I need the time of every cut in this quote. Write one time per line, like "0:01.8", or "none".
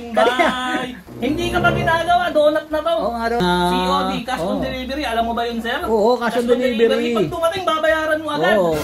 0:01.0
0:03.4